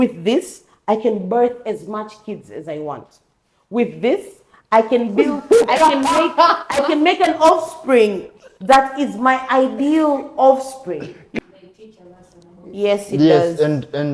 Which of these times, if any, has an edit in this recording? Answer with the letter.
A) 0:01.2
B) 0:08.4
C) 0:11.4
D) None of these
C